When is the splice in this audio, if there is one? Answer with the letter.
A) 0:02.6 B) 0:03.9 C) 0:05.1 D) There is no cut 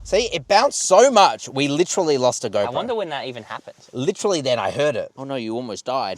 C